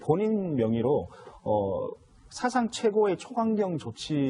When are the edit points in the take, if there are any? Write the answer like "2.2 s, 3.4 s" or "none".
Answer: 2.2 s

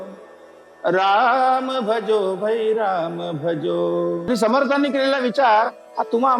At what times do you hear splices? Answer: 4.2 s

